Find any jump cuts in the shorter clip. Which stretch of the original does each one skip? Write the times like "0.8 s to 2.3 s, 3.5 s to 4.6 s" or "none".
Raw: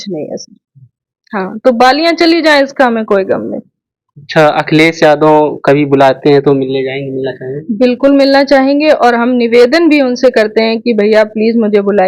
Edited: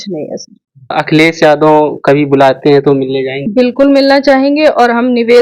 0.9 s to 4.5 s, 7.0 s to 7.6 s